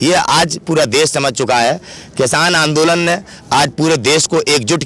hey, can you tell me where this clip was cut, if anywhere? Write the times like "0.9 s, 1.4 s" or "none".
none